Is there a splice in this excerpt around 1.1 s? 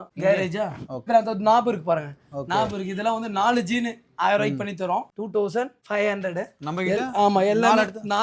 yes; 2 cuts; at 1.1 s, 5.1 s

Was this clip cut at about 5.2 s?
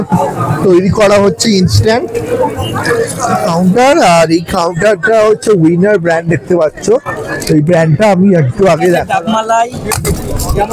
no; 2 cuts; at 3.5 s, 9.1 s

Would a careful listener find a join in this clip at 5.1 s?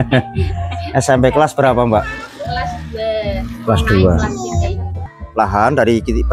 yes; 1 cut; at 5.1 s

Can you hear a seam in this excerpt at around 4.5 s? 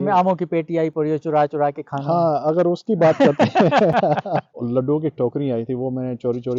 yes; 1 cut; at 4.5 s

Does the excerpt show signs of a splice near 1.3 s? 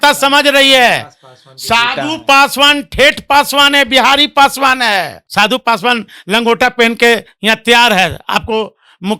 no; 1 cut; at 5.2 s

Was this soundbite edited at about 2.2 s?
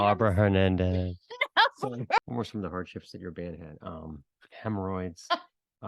yes; 1 cut; at 2.2 s

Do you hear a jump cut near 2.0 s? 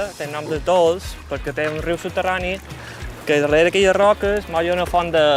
no; 0 cuts

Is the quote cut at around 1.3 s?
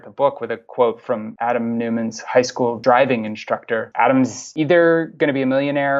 yes; 5 cuts; at 1.3 s, 2.8 s, 3.9 s, 4.4 s, 5.1 s

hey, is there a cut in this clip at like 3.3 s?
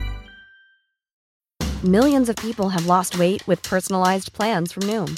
no; 1 cut; at 1.1 s

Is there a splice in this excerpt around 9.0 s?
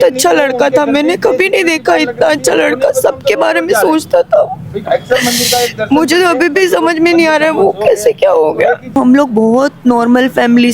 yes; 1 cut; at 9.0 s

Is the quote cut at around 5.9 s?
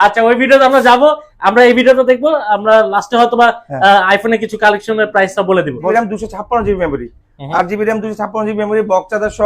yes; 1 cut; at 5.9 s

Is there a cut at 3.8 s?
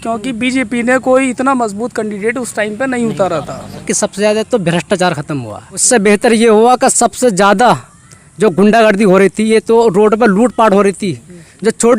yes; 2 cuts; at 3.8 s, 5.8 s

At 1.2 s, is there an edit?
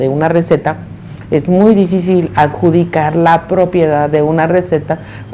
no; 0 cuts

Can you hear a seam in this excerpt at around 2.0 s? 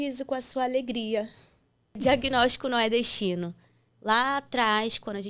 yes; 1 cut; at 2.0 s

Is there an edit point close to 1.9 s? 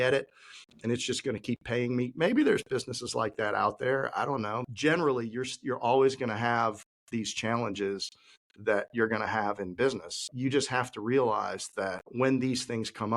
no; 3 cuts; at 4.6 s, 10.2 s, 12.0 s

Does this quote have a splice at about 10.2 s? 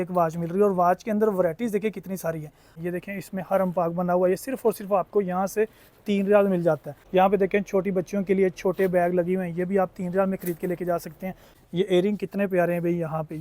no; 3 cuts; at 2.8 s, 6.9 s, 11.5 s

